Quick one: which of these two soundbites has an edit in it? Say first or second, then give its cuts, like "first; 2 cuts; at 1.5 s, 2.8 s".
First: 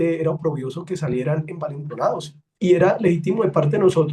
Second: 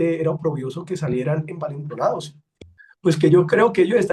second; 1 cut; at 2.5 s